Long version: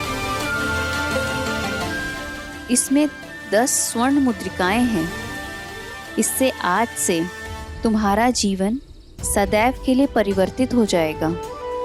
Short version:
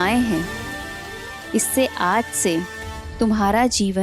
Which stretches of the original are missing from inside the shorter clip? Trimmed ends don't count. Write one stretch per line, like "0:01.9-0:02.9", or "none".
none